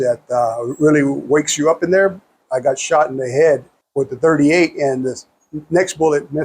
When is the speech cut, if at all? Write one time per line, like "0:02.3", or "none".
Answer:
0:02.4
0:03.8